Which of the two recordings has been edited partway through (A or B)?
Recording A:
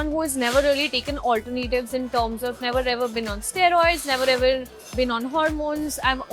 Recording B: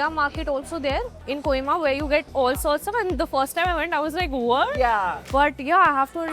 B